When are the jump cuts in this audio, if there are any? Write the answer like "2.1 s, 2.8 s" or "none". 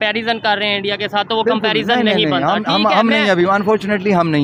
none